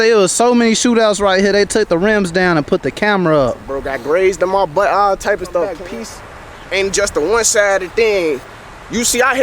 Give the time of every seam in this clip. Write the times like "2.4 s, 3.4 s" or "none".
5.8 s